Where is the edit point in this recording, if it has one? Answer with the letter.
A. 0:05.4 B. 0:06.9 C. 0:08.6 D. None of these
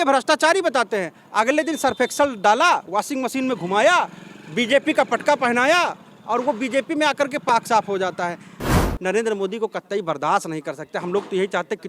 C